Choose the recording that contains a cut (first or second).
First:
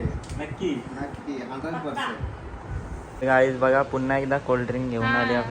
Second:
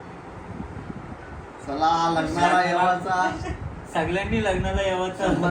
first